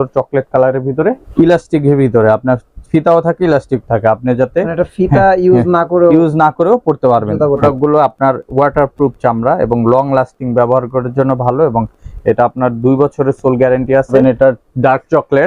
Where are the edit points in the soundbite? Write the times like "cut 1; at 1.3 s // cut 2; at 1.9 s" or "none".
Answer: cut 1; at 1.2 s // cut 2; at 7.6 s // cut 3; at 14.1 s